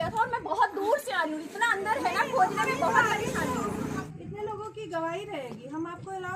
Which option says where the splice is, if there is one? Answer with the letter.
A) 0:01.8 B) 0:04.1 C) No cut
B